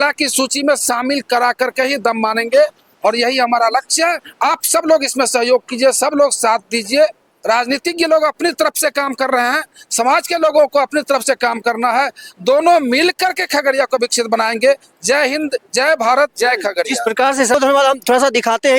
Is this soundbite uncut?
yes; 0 cuts

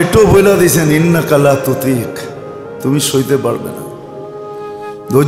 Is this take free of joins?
yes; 0 cuts

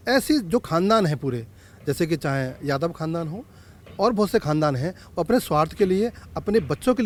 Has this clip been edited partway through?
no; 0 cuts

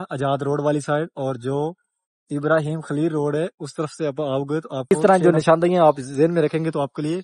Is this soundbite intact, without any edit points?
no; 1 cut; at 4.9 s

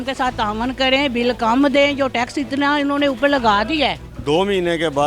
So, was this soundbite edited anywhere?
yes; 1 cut; at 4.1 s

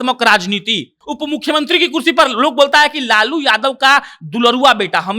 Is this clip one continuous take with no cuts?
no; 1 cut; at 1.0 s

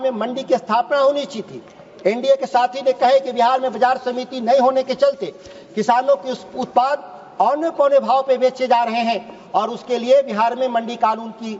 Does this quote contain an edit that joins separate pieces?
no; 0 cuts

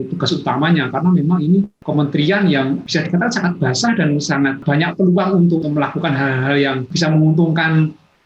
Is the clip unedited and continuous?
no; 5 cuts; at 1.8 s, 2.8 s, 4.6 s, 5.6 s, 6.9 s

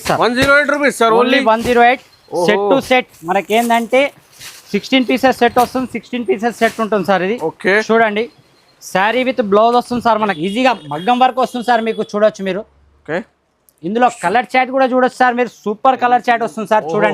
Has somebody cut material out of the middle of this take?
yes; 1 cut; at 10.3 s

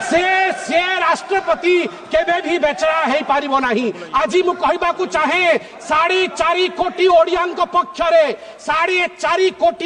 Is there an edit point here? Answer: no; 0 cuts

